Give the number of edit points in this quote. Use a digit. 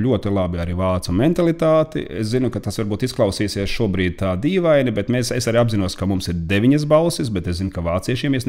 0